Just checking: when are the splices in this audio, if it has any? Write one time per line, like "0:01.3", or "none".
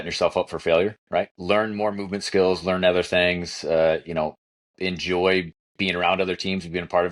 0:01.4